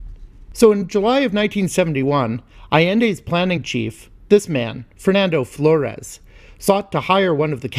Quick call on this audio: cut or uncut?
cut